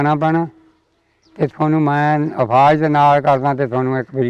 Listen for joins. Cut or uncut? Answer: uncut